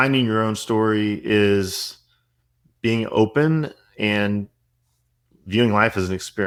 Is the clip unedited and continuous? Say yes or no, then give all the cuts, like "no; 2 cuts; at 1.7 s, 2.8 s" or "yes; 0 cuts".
yes; 0 cuts